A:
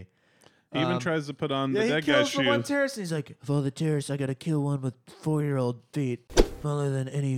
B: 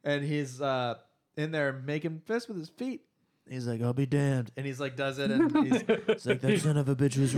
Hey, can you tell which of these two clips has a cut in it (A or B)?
A